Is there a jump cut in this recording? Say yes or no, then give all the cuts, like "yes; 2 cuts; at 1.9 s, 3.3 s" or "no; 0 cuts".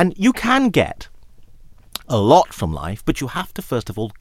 no; 0 cuts